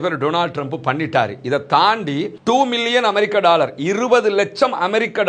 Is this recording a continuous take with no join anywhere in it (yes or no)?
no